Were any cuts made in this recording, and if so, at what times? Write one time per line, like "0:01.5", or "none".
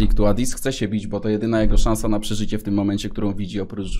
none